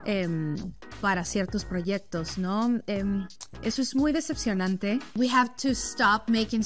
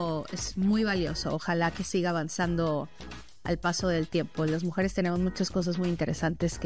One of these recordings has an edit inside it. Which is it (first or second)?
first